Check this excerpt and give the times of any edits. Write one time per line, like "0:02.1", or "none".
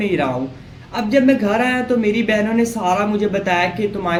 none